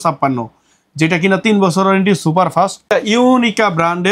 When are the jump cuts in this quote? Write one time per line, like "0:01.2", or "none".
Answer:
0:02.8